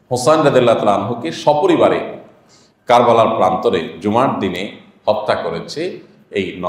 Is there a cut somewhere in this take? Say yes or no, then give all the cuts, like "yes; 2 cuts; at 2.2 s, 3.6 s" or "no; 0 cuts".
no; 0 cuts